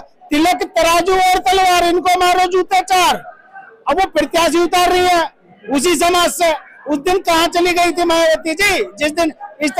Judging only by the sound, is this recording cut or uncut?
uncut